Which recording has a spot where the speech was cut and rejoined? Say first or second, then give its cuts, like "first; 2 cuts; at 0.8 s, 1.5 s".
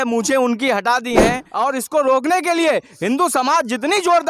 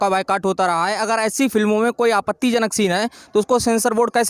first; 1 cut; at 1.4 s